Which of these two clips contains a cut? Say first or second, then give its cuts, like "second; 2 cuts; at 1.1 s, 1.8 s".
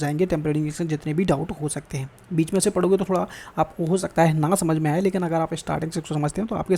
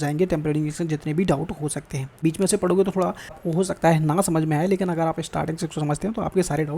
second; 2 cuts; at 2.0 s, 3.4 s